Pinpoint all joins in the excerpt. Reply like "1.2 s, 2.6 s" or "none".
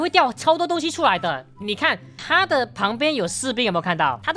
1.6 s